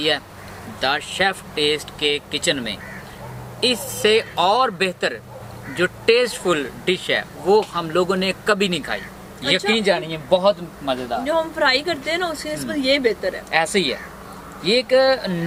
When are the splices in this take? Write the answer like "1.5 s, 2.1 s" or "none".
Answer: none